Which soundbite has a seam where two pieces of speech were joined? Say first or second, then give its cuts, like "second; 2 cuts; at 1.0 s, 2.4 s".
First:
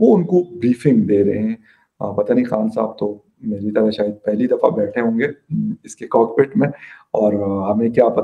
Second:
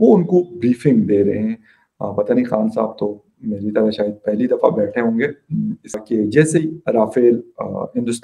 second; 1 cut; at 6.0 s